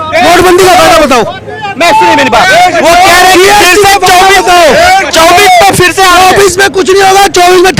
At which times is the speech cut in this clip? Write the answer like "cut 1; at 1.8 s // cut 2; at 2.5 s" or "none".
none

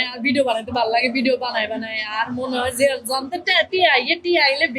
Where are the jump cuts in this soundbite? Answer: none

